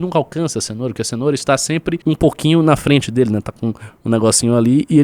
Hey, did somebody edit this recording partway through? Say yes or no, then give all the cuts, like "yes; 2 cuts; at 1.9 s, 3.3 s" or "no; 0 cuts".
yes; 1 cut; at 2.0 s